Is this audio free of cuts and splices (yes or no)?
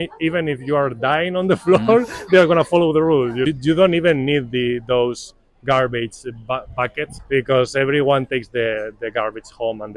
no